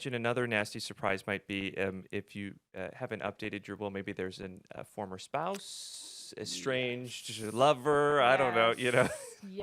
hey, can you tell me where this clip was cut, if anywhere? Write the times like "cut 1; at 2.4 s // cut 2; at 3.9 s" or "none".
none